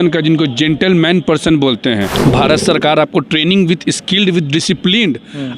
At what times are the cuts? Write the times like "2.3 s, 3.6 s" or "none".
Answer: 2.1 s

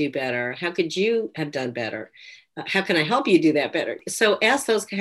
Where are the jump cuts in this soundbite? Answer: 4.0 s

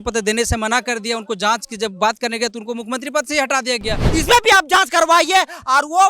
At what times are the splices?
4.0 s

